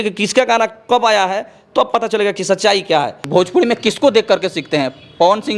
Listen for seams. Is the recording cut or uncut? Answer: cut